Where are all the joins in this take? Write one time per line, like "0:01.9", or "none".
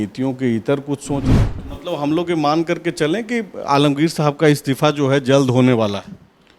0:01.3